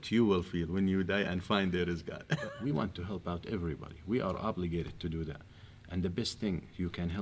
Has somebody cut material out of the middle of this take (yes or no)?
yes